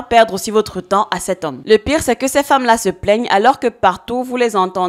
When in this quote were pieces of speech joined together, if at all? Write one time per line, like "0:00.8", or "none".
0:01.6